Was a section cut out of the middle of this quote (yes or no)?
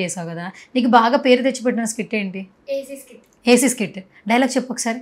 no